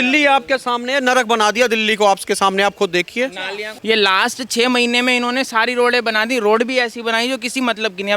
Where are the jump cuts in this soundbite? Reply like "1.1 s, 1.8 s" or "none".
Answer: 3.7 s